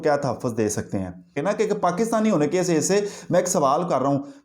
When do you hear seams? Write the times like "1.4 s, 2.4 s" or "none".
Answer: 1.3 s